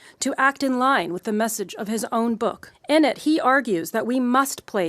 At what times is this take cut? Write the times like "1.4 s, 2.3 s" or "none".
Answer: 2.7 s